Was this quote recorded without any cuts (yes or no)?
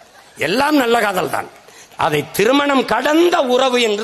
yes